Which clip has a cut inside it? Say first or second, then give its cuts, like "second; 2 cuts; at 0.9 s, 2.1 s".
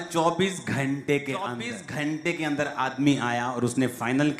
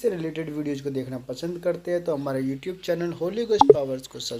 first; 1 cut; at 1.7 s